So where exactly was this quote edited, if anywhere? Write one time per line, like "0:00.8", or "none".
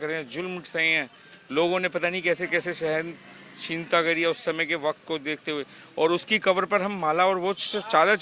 none